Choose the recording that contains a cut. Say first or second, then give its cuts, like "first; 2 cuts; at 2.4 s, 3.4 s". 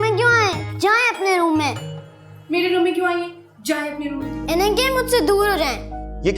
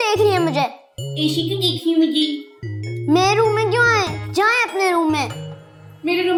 first; 1 cut; at 4.3 s